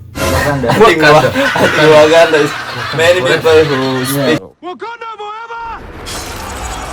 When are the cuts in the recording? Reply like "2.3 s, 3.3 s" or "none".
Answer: 4.5 s